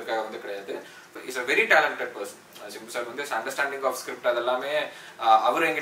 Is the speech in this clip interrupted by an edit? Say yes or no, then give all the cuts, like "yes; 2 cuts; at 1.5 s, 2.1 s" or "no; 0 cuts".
yes; 1 cut; at 1.1 s